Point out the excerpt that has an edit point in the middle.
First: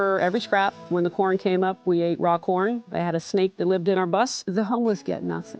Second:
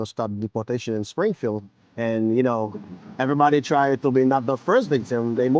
first; 3 cuts; at 0.9 s, 2.9 s, 4.4 s

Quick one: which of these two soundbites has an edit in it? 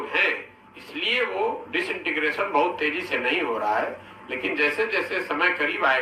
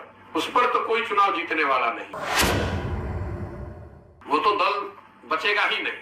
second; 1 cut; at 2.0 s

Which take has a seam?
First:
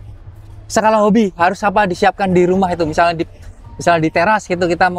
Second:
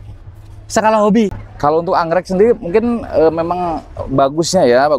second; 1 cut; at 1.3 s

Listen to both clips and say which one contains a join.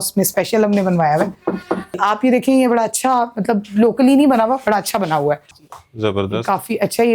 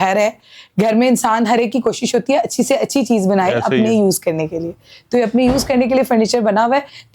first; 2 cuts; at 2.0 s, 5.5 s

